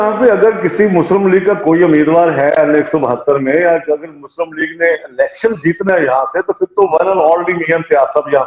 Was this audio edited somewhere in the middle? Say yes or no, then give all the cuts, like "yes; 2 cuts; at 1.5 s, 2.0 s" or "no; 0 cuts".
no; 0 cuts